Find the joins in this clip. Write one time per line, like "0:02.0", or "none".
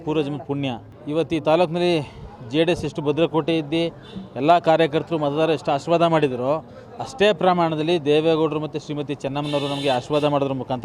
0:01.0

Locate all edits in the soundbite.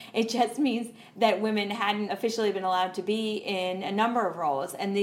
0:02.1

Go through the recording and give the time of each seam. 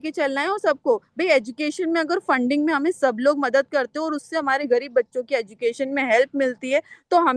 none

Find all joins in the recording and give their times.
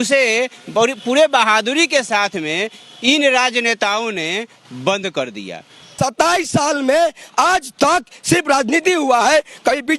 0:06.0

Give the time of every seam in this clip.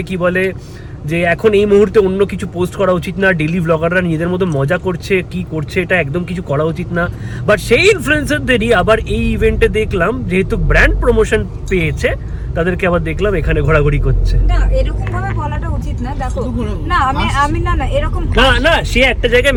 none

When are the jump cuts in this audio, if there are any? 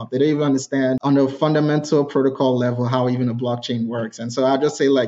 0:01.0

